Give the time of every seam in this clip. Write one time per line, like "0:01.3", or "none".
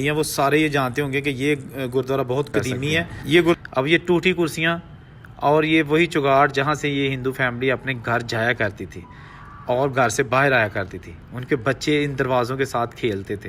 0:03.6